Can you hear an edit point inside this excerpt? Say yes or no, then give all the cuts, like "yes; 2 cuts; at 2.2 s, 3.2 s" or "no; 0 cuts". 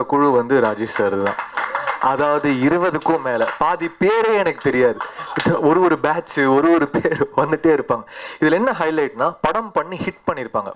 no; 0 cuts